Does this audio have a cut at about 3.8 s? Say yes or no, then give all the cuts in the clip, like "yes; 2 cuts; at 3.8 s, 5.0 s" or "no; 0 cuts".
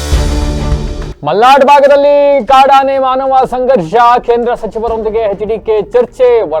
no; 1 cut; at 1.1 s